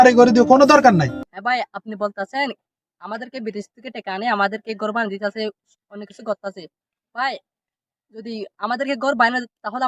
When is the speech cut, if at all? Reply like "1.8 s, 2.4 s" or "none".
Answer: 1.3 s